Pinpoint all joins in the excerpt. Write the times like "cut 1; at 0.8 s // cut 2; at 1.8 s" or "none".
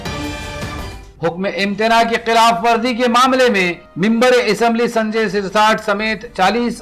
cut 1; at 1.0 s